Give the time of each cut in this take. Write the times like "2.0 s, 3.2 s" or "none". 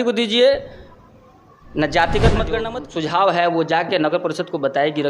2.8 s